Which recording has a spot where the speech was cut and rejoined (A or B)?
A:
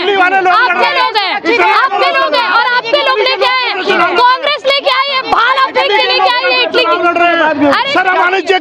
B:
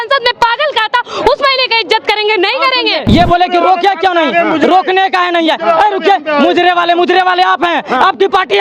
B